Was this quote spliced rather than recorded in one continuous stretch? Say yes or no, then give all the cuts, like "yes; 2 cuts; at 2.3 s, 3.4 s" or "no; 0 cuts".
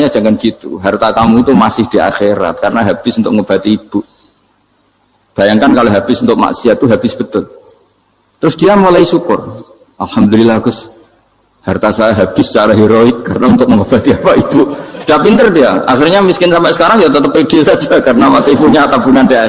no; 0 cuts